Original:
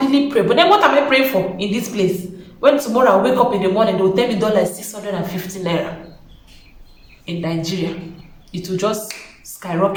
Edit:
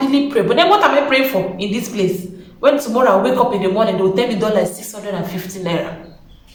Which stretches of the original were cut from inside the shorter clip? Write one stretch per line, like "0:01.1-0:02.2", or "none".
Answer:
none